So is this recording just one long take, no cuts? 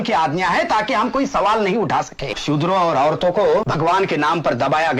no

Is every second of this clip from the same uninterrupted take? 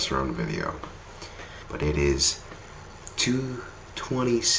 no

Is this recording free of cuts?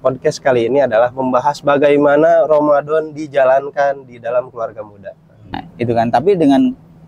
no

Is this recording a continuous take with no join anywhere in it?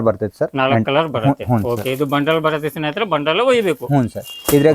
yes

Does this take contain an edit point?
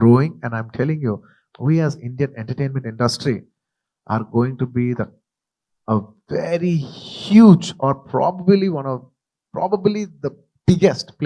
yes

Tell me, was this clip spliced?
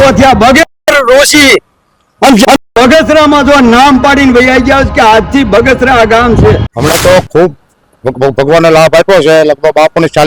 yes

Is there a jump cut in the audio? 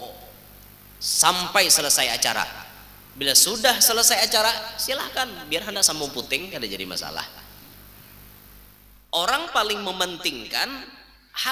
yes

